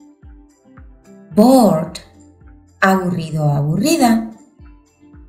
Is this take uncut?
no; 1 cut; at 1.3 s

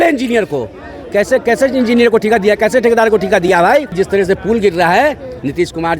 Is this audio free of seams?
no; 1 cut; at 3.9 s

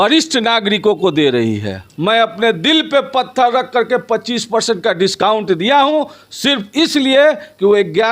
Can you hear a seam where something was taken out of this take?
yes; 1 cut; at 1.9 s

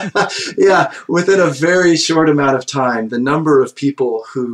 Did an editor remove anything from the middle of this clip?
no; 0 cuts

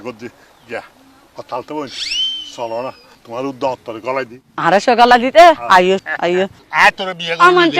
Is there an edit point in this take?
yes; 2 cuts; at 3.2 s, 6.1 s

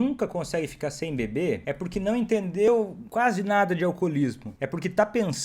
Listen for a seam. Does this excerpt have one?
yes; 3 cuts; at 1.6 s, 2.8 s, 4.5 s

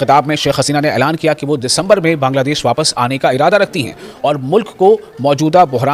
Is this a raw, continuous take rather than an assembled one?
yes; 0 cuts

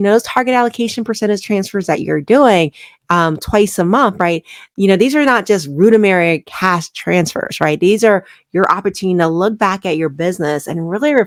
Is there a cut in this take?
no; 0 cuts

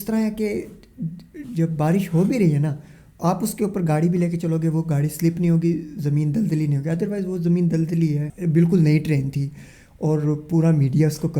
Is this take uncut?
no; 1 cut; at 8.3 s

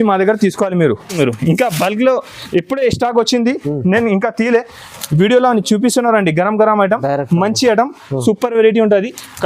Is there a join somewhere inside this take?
yes; 1 cut; at 1.2 s

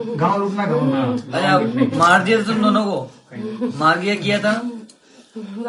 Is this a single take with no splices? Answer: yes; 0 cuts

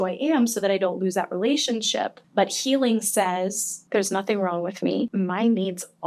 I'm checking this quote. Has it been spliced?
yes; 3 cuts; at 2.2 s, 3.7 s, 5.1 s

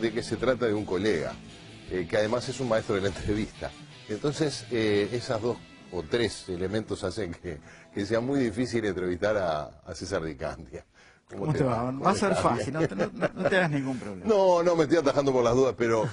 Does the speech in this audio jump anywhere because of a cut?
yes; 1 cut; at 10.4 s

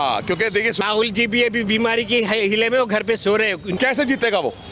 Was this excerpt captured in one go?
no; 2 cuts; at 0.8 s, 3.7 s

